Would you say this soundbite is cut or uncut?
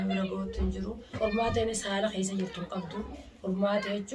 cut